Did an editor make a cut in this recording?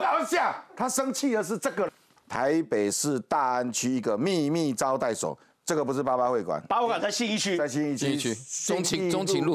yes; 1 cut; at 2.0 s

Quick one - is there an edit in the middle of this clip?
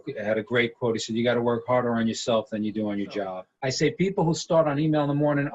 yes; 1 cut; at 3.4 s

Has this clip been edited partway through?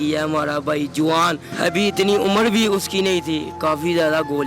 yes; 1 cut; at 3.6 s

